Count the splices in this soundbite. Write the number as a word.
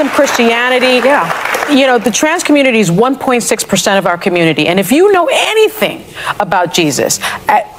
zero